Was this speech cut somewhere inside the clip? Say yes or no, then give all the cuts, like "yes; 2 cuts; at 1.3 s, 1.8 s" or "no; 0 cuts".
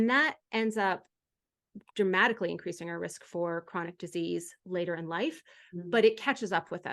no; 0 cuts